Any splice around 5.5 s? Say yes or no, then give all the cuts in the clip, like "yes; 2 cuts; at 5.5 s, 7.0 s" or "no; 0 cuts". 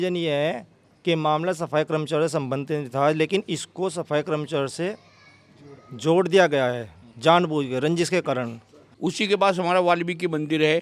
no; 1 cut; at 8.8 s